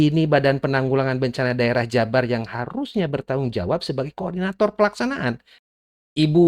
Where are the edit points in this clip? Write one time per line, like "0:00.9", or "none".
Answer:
0:05.5